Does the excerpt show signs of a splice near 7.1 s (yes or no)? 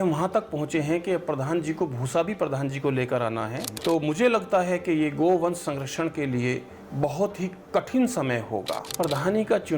no